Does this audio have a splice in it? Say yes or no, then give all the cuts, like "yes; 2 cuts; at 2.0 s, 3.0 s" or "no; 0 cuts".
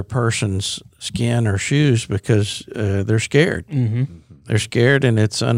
no; 0 cuts